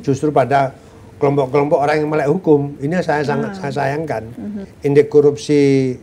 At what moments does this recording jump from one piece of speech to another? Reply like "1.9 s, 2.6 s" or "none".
4.6 s

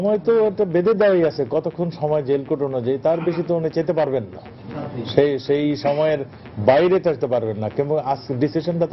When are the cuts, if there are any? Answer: none

